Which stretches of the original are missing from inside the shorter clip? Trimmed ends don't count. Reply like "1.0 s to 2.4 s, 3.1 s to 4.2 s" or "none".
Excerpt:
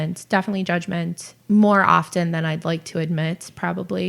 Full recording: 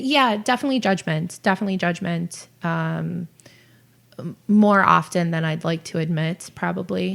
2.4 s to 4.3 s